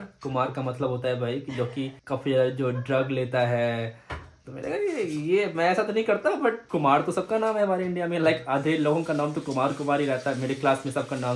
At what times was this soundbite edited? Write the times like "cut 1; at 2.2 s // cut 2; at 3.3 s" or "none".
none